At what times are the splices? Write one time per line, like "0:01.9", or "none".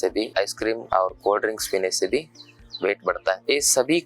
none

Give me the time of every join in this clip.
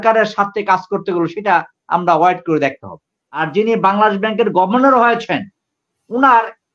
0:03.4

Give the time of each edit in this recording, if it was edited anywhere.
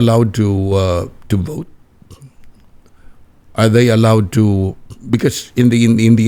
none

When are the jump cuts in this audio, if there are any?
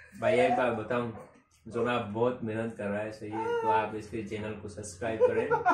none

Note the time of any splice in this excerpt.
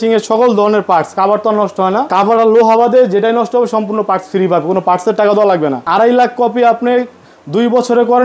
0:02.1
0:05.9

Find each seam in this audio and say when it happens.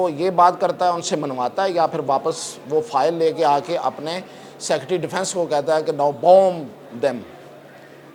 none

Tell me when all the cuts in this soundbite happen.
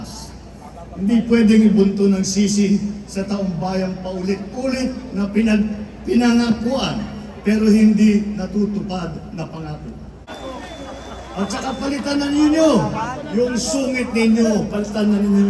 0:10.3

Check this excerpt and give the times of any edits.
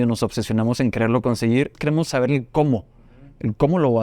0:01.8

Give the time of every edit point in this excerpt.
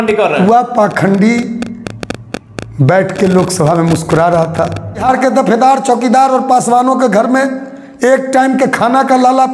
0:05.0

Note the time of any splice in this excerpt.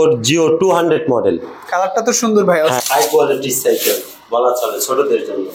0:02.8

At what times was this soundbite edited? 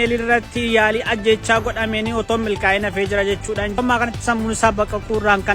0:03.8

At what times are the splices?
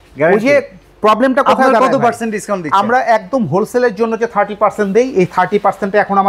none

